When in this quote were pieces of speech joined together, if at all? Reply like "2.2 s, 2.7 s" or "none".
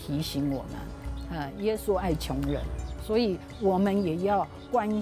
none